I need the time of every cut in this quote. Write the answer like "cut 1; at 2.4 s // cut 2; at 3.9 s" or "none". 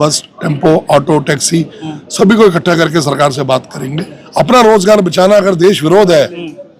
cut 1; at 4.1 s